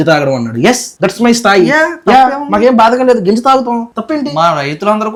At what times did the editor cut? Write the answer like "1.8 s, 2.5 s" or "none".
none